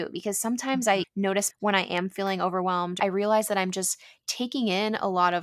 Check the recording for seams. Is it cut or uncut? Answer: cut